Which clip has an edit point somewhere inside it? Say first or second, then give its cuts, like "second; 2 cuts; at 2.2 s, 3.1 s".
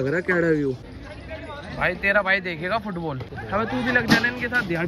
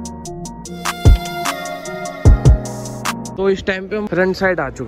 second; 1 cut; at 3.3 s